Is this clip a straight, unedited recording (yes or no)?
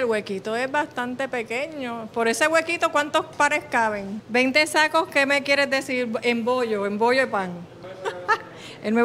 yes